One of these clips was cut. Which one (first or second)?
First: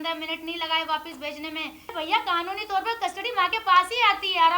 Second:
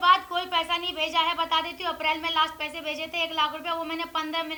first